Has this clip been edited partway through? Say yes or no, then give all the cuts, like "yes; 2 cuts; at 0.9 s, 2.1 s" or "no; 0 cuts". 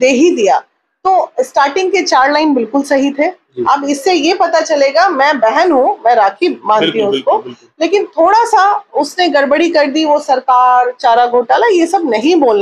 no; 0 cuts